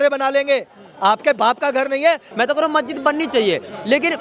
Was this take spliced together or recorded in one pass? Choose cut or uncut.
cut